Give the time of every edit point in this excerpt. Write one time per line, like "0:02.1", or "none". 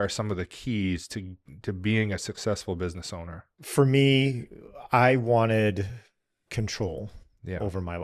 0:03.6